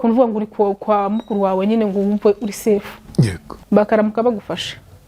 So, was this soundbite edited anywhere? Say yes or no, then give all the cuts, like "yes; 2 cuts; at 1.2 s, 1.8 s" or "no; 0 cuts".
yes; 1 cut; at 3.5 s